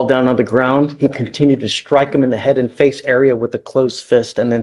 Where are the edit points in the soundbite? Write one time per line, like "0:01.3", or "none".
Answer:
none